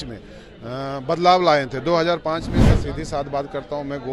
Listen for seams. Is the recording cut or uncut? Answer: cut